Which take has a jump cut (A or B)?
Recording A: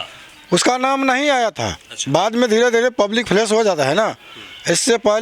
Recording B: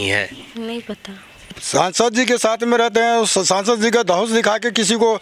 B